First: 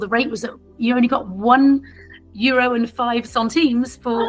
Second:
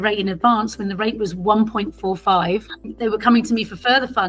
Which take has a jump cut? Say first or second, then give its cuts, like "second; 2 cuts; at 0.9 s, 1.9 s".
second; 1 cut; at 2.8 s